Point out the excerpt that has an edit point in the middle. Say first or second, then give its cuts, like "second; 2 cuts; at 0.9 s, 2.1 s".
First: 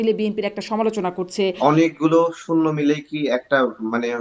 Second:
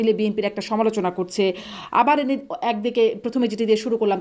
first; 1 cut; at 1.6 s